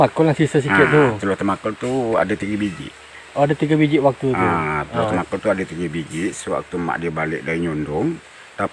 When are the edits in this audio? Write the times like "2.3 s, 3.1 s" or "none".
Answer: none